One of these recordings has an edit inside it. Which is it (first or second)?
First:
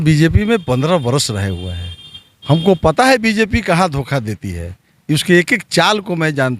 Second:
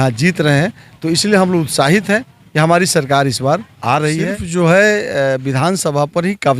second